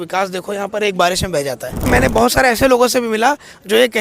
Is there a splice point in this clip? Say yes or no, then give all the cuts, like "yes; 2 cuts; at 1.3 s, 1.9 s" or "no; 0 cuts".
yes; 1 cut; at 1.9 s